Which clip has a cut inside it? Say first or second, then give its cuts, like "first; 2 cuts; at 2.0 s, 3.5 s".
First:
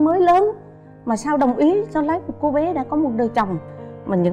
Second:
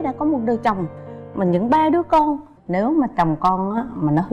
second; 1 cut; at 2.6 s